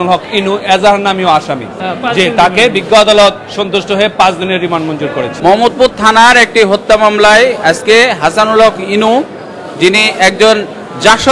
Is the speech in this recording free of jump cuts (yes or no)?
no